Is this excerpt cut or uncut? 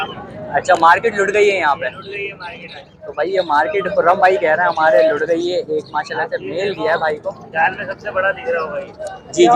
uncut